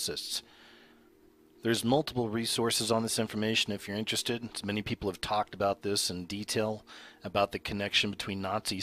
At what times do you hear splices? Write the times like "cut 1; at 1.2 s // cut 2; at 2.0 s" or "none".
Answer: none